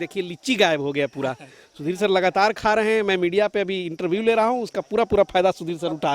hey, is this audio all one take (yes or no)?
yes